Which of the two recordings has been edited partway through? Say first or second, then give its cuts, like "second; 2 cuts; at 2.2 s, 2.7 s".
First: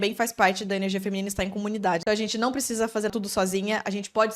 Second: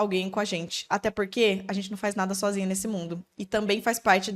first; 2 cuts; at 2.0 s, 3.1 s